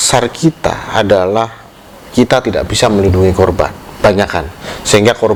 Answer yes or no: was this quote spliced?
no